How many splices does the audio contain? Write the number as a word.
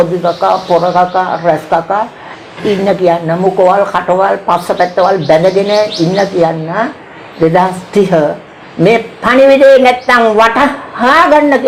zero